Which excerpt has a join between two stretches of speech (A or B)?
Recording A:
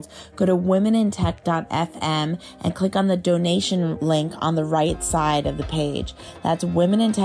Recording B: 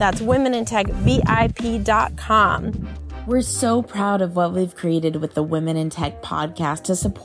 B